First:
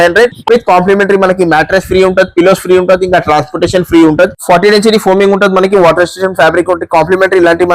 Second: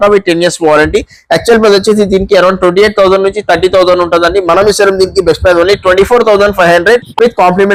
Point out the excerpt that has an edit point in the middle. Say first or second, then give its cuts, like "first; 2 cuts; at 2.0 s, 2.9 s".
first; 1 cut; at 4.4 s